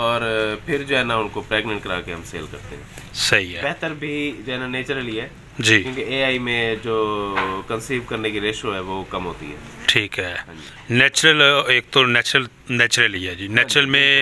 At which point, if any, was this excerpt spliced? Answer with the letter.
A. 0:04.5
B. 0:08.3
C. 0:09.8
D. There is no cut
D